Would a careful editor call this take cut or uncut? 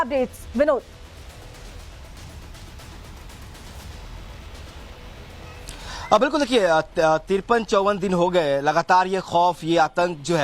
cut